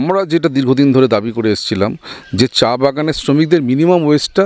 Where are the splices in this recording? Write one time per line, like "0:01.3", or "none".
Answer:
none

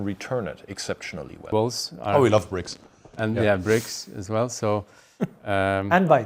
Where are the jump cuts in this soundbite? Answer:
0:01.5

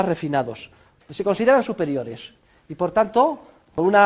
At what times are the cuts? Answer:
none

